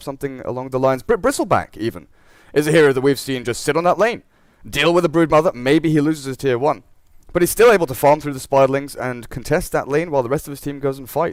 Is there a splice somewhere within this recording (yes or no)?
no